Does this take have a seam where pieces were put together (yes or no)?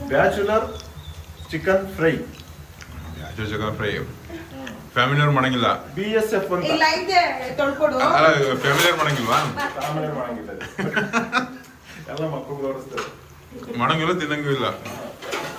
no